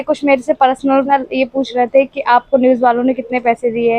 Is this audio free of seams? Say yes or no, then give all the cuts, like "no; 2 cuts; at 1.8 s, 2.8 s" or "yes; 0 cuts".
no; 1 cut; at 1.1 s